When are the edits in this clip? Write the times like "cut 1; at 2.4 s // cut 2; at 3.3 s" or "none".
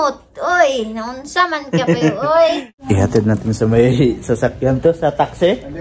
cut 1; at 2.7 s